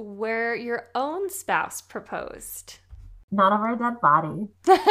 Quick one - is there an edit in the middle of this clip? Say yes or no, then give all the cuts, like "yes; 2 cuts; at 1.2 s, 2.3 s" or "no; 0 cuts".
yes; 1 cut; at 3.2 s